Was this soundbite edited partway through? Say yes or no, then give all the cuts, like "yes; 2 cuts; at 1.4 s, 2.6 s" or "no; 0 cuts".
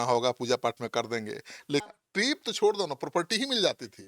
yes; 1 cut; at 1.8 s